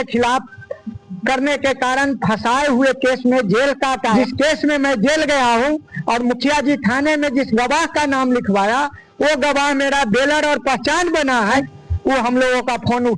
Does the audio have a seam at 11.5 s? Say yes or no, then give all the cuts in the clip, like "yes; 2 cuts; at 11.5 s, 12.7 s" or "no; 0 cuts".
yes; 2 cuts; at 4.0 s, 11.5 s